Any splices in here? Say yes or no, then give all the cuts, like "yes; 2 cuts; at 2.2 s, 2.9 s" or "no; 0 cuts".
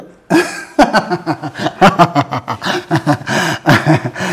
no; 0 cuts